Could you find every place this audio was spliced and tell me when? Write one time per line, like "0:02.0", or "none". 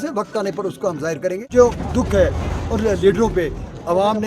0:01.5